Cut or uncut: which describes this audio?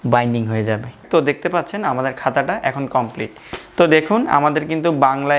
cut